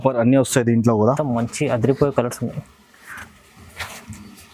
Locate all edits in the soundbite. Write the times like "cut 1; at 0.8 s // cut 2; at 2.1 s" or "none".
cut 1; at 1.2 s